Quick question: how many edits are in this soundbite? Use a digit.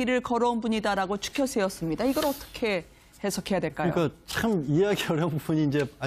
1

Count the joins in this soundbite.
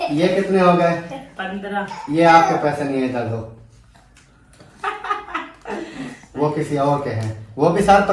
2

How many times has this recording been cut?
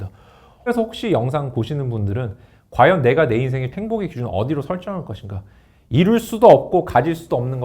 2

